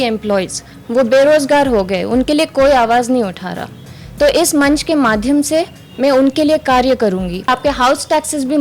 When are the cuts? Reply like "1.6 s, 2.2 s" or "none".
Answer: 7.5 s